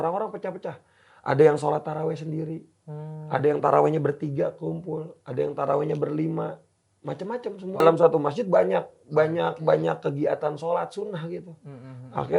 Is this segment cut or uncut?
cut